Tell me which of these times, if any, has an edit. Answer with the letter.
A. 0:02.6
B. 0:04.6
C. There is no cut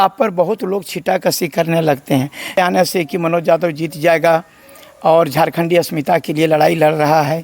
A